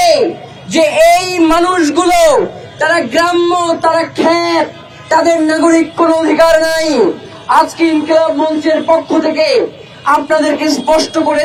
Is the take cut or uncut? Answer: uncut